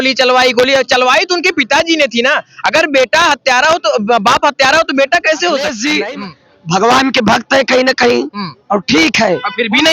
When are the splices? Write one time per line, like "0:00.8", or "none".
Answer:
0:05.8